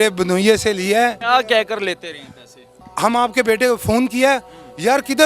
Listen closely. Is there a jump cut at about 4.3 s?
no; 1 cut; at 1.2 s

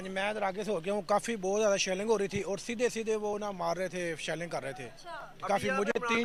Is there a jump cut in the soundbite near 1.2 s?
no; 0 cuts

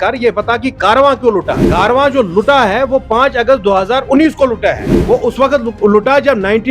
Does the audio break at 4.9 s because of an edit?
yes; 2 cuts; at 1.6 s, 4.9 s

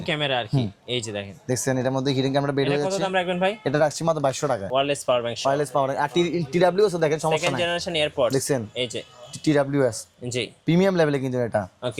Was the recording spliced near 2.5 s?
no; 1 cut; at 4.6 s

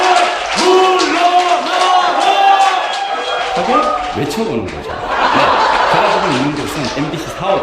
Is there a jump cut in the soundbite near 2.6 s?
no; 1 cut; at 6.2 s

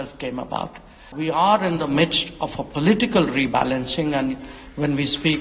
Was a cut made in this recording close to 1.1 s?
yes; 1 cut; at 1.1 s

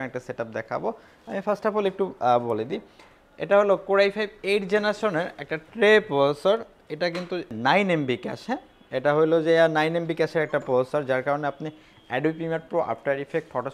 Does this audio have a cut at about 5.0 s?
no; 0 cuts

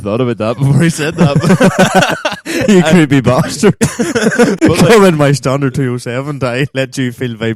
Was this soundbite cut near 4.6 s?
no; 0 cuts

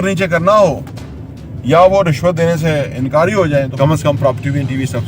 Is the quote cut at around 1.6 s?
no; 1 cut; at 3.7 s

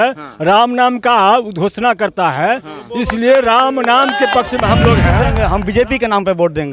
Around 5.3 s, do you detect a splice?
yes; 1 cut; at 5.3 s

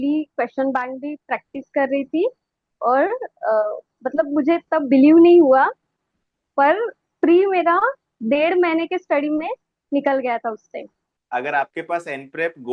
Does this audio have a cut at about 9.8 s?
no; 1 cut; at 11.1 s

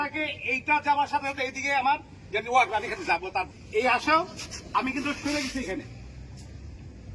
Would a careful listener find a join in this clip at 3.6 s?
yes; 1 cut; at 3.6 s

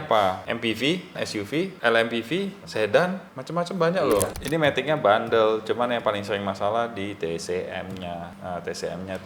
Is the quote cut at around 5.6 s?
no; 1 cut; at 4.4 s

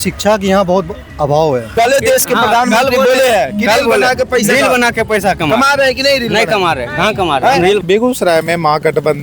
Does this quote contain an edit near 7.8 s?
yes; 2 cuts; at 1.7 s, 7.8 s

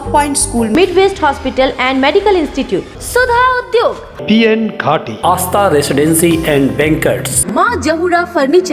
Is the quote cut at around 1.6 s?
no; 0 cuts

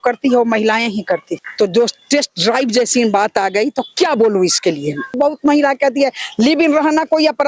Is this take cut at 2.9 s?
no; 2 cuts; at 1.4 s, 5.1 s

